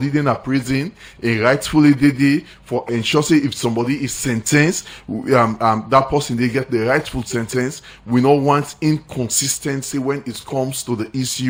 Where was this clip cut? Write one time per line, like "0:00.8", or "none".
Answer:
none